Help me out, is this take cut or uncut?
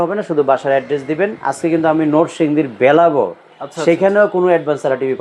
uncut